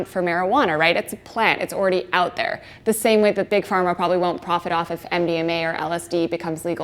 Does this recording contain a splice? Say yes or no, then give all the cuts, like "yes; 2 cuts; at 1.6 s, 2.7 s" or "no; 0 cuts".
yes; 1 cut; at 3.5 s